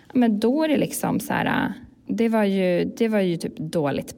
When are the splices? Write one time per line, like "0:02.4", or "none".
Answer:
0:02.0